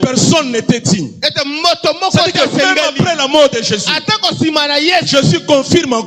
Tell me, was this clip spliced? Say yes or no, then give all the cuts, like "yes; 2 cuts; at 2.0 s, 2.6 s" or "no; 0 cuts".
no; 0 cuts